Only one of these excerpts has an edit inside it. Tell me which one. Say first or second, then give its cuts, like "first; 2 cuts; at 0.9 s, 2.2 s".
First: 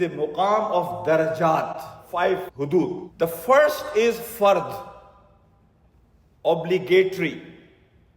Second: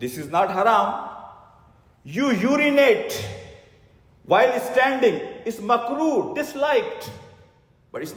first; 2 cuts; at 1.9 s, 3.1 s